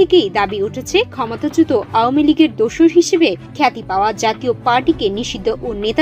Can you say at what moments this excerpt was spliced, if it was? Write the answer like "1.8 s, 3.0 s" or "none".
none